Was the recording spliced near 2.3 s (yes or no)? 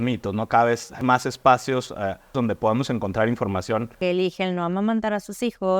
yes